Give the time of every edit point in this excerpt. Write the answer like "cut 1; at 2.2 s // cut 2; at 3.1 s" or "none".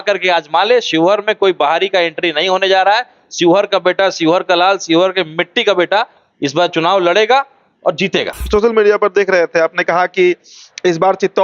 cut 1; at 8.4 s